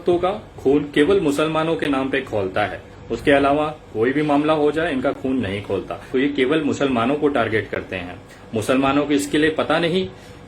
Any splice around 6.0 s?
yes; 1 cut; at 6.0 s

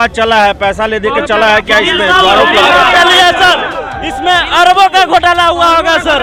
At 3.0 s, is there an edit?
no; 0 cuts

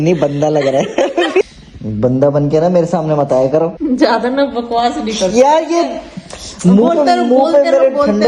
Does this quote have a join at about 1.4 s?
yes; 2 cuts; at 1.4 s, 3.8 s

